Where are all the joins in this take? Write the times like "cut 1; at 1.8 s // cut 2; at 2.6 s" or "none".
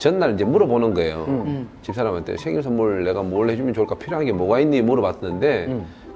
none

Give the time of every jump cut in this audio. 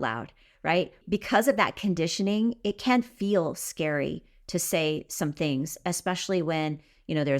cut 1; at 1.0 s

